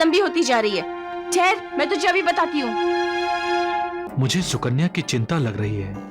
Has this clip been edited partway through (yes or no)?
yes